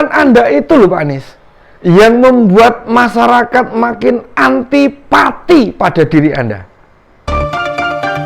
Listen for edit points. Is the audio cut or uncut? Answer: cut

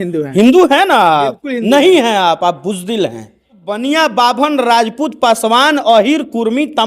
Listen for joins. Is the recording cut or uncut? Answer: cut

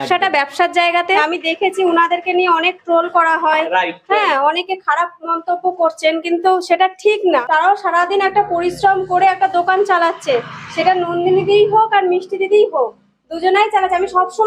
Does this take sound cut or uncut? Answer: cut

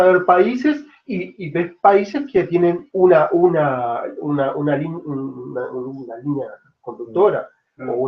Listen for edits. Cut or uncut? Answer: cut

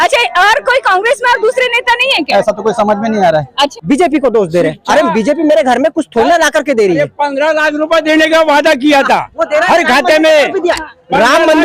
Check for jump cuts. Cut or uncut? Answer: cut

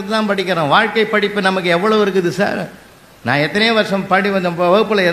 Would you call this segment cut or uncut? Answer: uncut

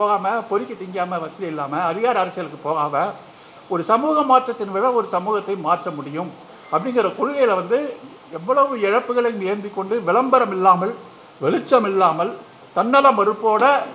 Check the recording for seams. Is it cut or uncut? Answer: uncut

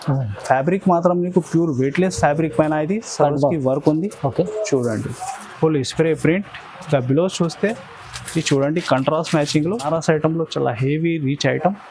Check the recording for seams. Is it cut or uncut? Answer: cut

